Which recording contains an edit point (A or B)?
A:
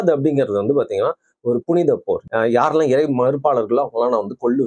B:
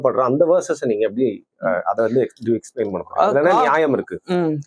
A